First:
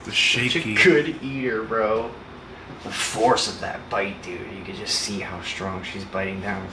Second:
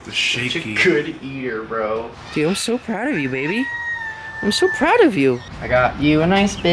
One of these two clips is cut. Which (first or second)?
second